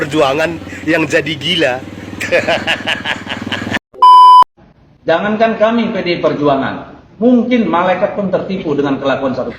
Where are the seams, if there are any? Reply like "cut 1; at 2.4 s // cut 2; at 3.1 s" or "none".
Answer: cut 1; at 3.7 s // cut 2; at 4.6 s